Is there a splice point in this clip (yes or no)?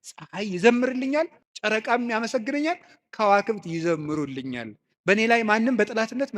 yes